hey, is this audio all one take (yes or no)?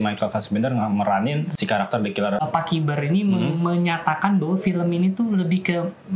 no